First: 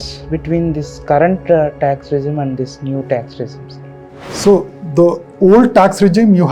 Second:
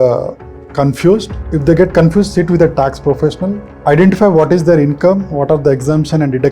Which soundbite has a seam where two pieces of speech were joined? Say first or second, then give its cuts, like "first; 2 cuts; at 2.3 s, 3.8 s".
second; 2 cuts; at 1.4 s, 3.7 s